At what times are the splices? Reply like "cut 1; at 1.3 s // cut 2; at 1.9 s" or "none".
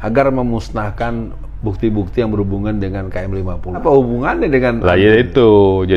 cut 1; at 3.8 s